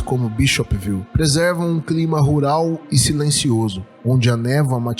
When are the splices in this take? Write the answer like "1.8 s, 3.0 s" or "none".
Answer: 1.1 s, 3.9 s